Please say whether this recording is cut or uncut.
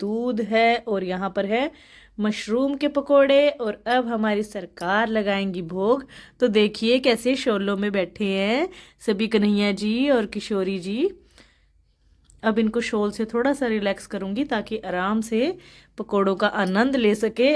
uncut